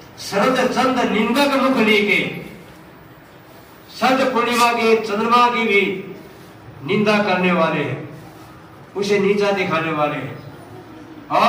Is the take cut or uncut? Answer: uncut